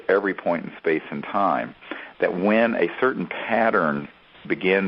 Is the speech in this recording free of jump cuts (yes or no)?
yes